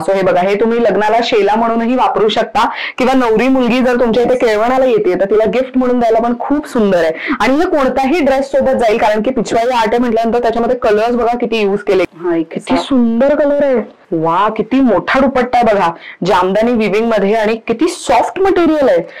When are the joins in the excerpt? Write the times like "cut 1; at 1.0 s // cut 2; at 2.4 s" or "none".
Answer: cut 1; at 12.1 s // cut 2; at 14.0 s